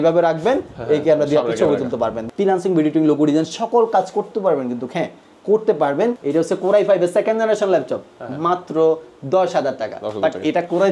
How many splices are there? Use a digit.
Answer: 2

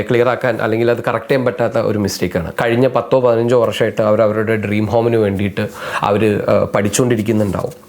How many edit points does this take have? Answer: 1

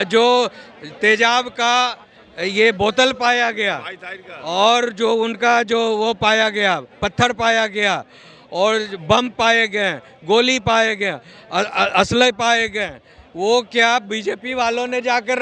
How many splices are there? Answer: 0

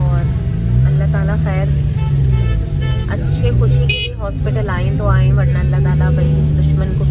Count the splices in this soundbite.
0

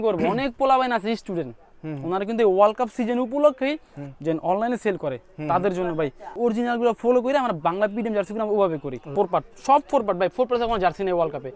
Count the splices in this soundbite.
2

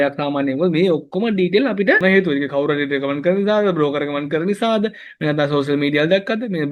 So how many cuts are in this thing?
1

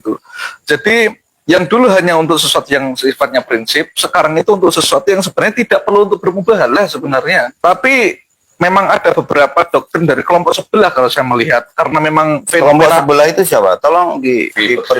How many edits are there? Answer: 1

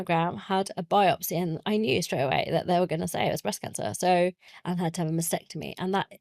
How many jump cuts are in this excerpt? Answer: 1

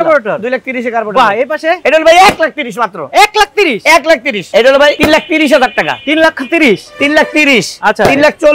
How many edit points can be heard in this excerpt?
3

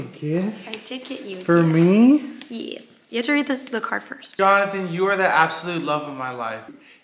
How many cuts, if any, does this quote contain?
0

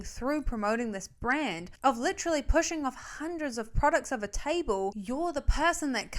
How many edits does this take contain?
1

